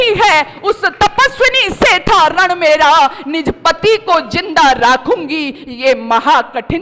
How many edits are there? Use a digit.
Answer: 0